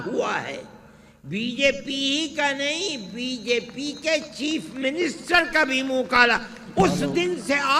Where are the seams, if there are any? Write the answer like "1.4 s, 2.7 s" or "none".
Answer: none